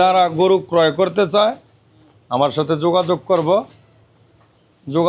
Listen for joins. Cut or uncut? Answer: uncut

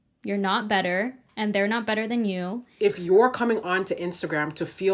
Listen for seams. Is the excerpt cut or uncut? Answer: cut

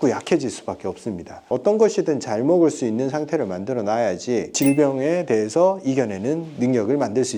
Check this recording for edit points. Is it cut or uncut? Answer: cut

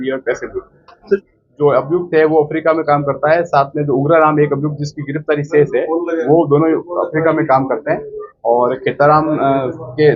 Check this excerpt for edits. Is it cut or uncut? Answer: cut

